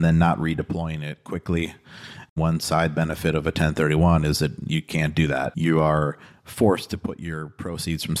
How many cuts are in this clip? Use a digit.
2